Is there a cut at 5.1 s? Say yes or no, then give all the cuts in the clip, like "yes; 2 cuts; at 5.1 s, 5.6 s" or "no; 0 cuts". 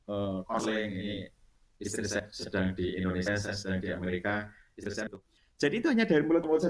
yes; 1 cut; at 5.1 s